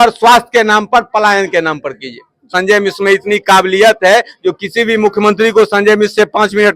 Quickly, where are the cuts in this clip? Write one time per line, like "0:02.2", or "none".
0:02.5